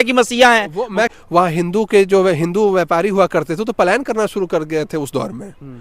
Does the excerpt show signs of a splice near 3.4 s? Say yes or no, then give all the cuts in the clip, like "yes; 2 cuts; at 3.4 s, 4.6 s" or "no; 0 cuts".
no; 1 cut; at 1.1 s